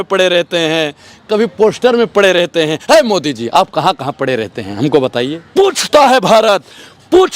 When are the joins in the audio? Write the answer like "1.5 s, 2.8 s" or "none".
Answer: 5.4 s